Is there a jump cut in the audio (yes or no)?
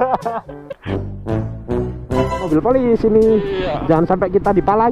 yes